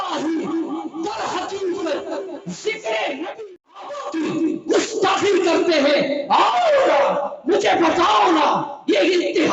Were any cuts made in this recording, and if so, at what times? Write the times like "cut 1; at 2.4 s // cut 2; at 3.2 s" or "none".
cut 1; at 3.4 s